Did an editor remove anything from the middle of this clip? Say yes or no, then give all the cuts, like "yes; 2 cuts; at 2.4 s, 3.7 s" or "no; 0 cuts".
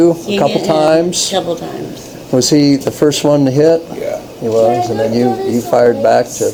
no; 0 cuts